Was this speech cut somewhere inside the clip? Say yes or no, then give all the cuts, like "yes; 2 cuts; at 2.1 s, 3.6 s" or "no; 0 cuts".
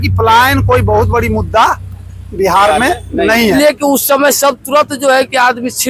yes; 1 cut; at 3.5 s